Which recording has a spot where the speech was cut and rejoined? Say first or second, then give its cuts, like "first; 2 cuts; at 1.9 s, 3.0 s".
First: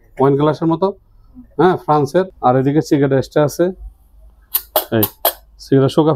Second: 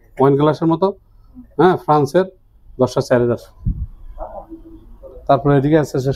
first; 1 cut; at 2.3 s